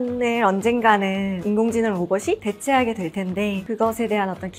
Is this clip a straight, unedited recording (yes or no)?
no